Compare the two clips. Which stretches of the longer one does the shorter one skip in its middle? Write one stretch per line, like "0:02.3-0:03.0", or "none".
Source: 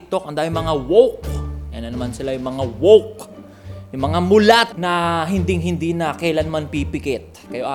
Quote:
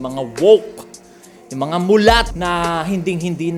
none